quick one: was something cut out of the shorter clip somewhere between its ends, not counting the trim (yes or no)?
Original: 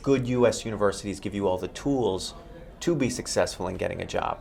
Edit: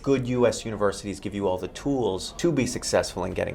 yes